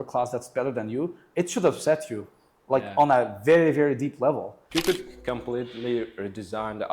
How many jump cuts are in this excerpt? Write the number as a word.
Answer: one